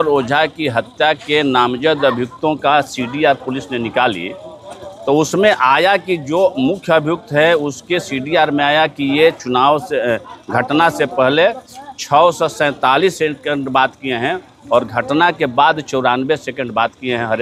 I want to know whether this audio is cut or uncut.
uncut